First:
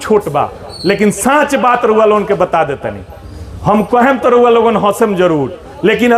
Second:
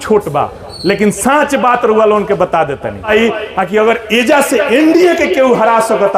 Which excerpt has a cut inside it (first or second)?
second